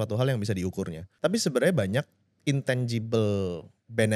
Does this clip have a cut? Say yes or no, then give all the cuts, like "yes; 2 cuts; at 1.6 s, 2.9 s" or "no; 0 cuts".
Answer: yes; 1 cut; at 1.0 s